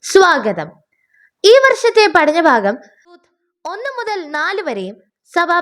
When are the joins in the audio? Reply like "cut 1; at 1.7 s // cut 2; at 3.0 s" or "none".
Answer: cut 1; at 3.2 s